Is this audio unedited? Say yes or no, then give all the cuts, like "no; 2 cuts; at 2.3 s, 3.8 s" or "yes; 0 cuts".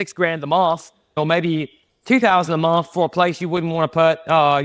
no; 1 cut; at 1.1 s